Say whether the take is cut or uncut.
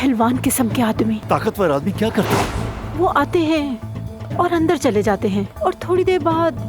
cut